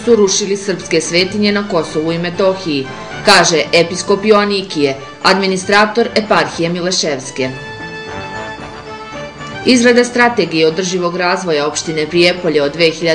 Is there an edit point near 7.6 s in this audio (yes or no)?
yes